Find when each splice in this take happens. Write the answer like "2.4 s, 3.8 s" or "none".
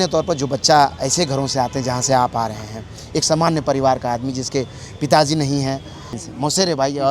6.1 s